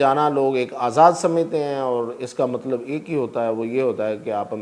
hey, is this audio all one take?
yes; 0 cuts

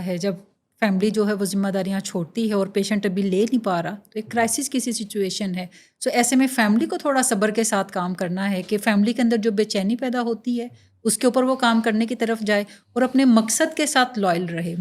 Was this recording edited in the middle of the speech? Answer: no; 0 cuts

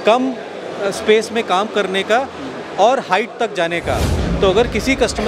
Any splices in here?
yes; 1 cut; at 4.2 s

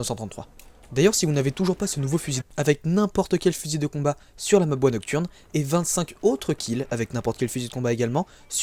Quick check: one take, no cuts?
yes; 0 cuts

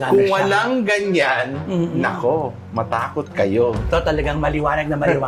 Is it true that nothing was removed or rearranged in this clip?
no; 1 cut; at 3.9 s

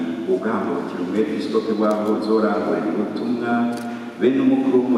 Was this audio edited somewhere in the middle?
no; 0 cuts

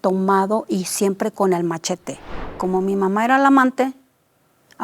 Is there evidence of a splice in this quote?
yes; 1 cut; at 2.6 s

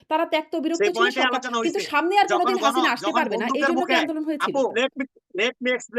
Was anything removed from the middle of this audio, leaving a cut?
yes; 1 cut; at 4.7 s

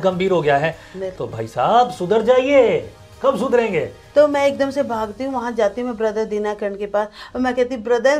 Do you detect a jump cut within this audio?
yes; 1 cut; at 4.0 s

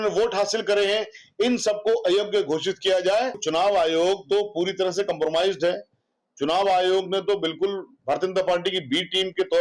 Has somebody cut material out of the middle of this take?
yes; 1 cut; at 3.4 s

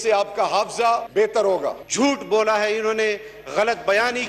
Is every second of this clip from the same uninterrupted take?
no; 2 cuts; at 1.1 s, 1.8 s

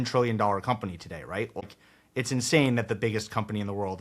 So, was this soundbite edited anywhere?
yes; 1 cut; at 1.6 s

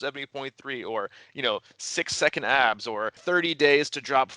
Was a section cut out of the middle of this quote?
yes; 1 cut; at 3.2 s

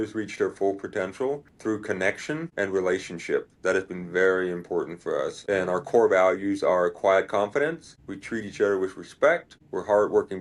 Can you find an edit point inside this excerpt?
yes; 1 cut; at 1.5 s

